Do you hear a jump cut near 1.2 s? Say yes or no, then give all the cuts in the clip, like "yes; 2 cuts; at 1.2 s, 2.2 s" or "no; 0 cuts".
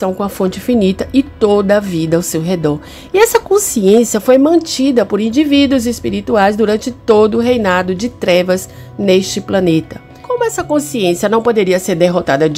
no; 0 cuts